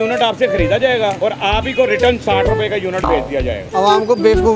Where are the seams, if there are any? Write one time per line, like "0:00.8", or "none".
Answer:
0:01.2
0:03.6